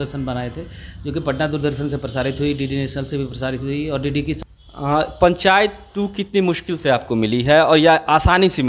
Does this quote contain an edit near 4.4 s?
yes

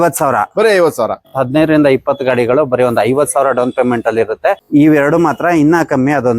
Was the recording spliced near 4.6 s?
yes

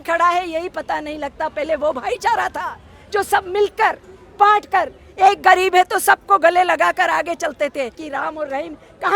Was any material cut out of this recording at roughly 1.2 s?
no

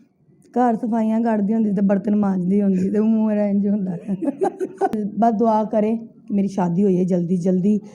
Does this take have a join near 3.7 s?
no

